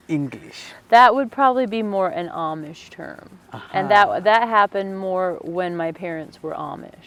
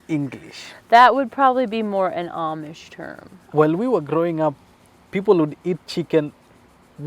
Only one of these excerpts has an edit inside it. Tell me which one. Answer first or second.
second